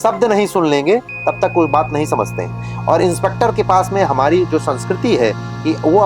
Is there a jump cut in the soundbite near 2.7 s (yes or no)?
no